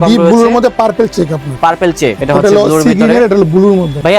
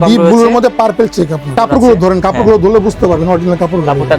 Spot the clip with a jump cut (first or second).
second